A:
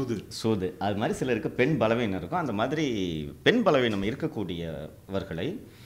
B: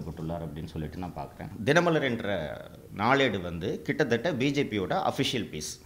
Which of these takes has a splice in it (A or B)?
B